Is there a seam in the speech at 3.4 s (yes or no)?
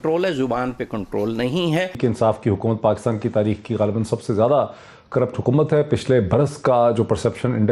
no